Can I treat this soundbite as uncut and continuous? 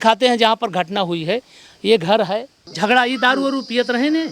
no; 1 cut; at 2.6 s

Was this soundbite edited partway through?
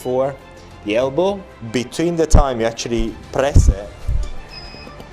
yes; 1 cut; at 1.5 s

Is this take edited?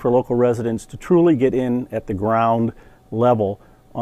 no; 0 cuts

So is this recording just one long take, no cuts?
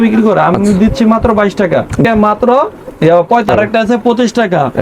no; 2 cuts; at 2.0 s, 3.5 s

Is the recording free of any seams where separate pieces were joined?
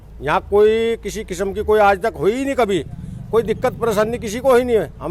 yes; 0 cuts

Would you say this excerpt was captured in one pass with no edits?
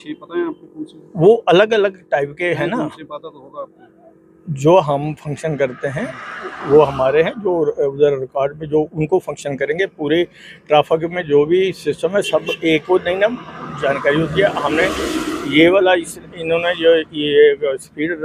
yes; 0 cuts

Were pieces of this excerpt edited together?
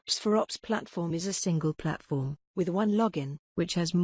yes; 1 cut; at 1.1 s

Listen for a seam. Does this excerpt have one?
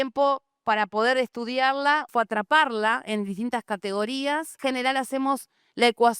yes; 2 cuts; at 2.1 s, 4.6 s

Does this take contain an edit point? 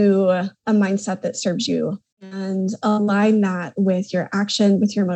yes; 1 cut; at 2.3 s

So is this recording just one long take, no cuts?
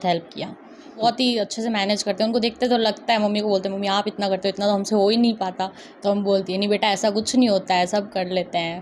no; 1 cut; at 1.0 s

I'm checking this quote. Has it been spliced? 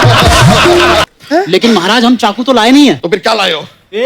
yes; 1 cut; at 1.0 s

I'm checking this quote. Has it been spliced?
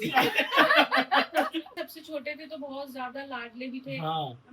yes; 1 cut; at 1.8 s

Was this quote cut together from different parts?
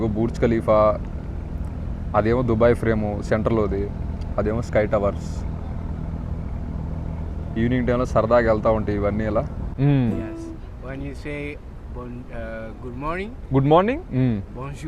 yes; 1 cut; at 9.6 s

